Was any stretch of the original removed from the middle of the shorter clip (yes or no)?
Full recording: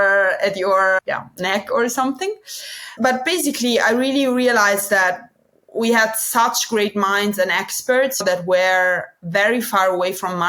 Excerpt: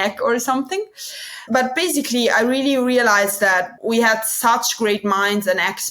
yes